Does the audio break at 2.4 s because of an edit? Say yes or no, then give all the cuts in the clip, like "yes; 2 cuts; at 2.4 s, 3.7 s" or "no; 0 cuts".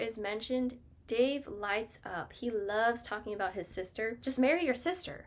no; 1 cut; at 4.2 s